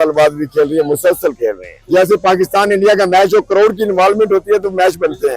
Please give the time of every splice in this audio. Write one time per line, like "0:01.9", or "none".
0:01.7